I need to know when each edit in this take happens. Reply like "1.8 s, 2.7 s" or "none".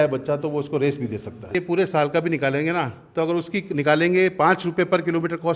1.5 s